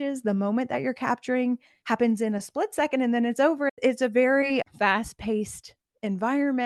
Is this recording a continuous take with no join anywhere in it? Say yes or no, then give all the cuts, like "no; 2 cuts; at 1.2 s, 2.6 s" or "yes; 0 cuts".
yes; 0 cuts